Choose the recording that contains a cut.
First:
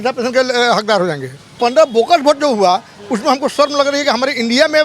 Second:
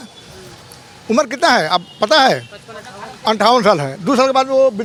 first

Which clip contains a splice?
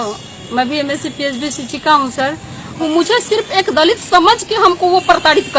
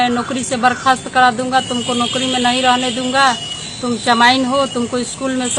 first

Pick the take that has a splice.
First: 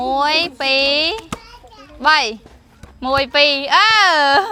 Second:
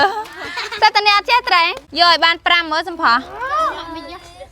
second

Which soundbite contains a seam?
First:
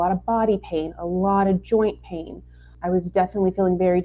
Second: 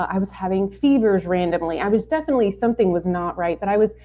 first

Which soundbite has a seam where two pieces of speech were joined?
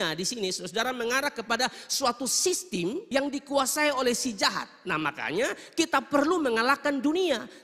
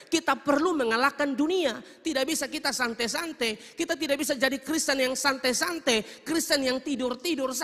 first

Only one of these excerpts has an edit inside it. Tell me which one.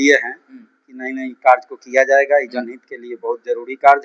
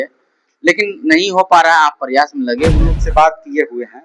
second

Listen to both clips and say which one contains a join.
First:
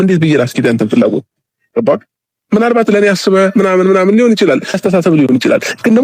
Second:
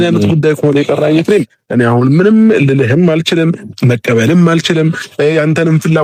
first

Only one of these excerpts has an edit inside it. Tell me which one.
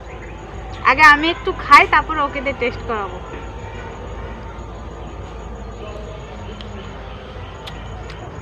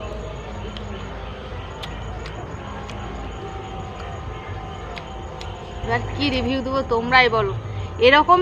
second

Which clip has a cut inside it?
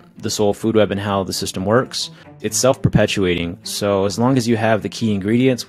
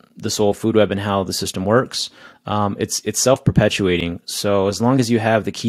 first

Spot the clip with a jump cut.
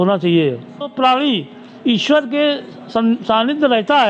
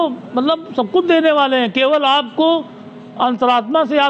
first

